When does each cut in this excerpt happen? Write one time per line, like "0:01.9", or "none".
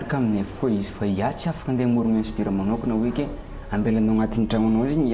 none